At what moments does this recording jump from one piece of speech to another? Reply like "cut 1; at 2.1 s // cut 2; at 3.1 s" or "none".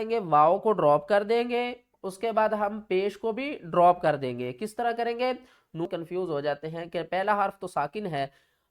cut 1; at 5.9 s

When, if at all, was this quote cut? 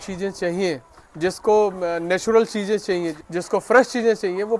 cut 1; at 3.2 s

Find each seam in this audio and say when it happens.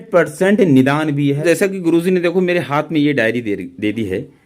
cut 1; at 1.4 s

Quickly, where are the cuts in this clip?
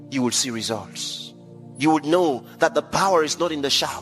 cut 1; at 1.6 s

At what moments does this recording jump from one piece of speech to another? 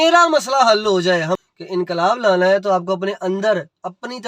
cut 1; at 1.4 s

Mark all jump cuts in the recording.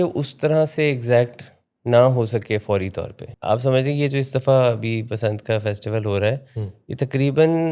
cut 1; at 3.3 s

